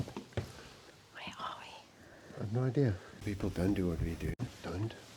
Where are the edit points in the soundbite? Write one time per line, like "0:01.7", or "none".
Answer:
0:00.9
0:03.1